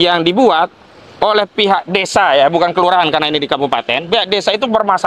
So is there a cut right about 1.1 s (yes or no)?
no